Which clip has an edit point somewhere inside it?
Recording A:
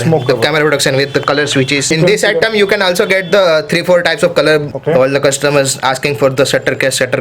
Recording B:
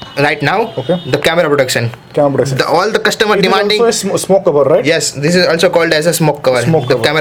A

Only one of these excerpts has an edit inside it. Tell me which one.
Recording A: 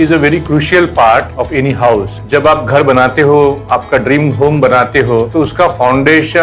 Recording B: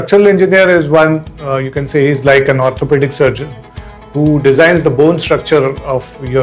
A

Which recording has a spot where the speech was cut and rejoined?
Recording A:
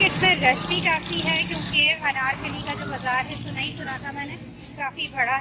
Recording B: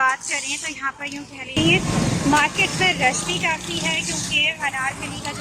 B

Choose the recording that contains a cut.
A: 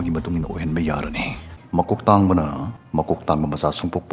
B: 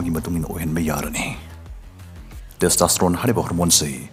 A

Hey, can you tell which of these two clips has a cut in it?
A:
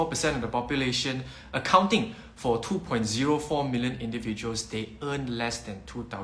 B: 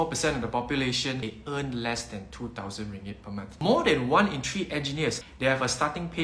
B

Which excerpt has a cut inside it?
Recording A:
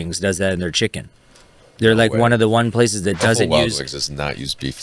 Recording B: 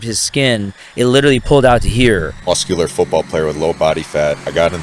B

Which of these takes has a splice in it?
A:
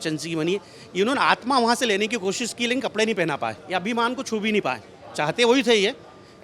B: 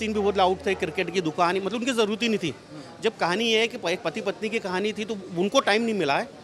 A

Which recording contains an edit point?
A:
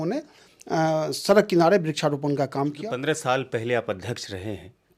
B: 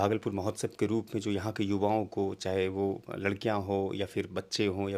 A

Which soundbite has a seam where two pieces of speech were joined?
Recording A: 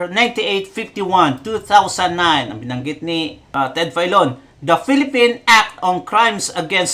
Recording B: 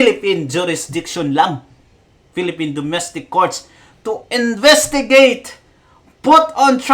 A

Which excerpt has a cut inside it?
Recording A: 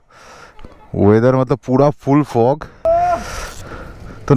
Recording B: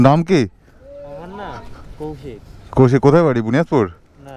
A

